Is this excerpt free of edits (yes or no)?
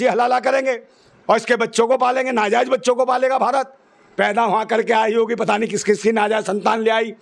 no